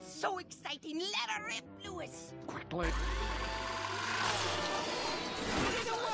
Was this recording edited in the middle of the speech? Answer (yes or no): yes